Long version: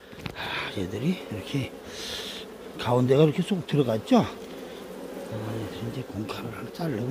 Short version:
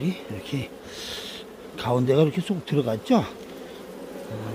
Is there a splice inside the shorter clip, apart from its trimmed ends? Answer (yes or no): no